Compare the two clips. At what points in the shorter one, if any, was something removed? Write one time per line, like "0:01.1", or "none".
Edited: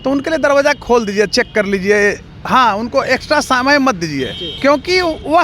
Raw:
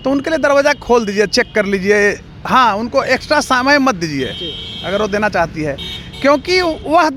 0:04.4